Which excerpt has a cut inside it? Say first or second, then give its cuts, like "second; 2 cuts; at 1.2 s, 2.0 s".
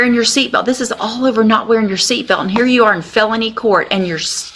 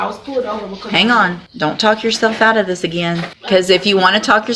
second; 2 cuts; at 1.4 s, 3.3 s